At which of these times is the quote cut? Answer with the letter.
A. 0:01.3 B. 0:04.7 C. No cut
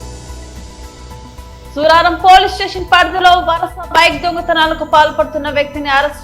A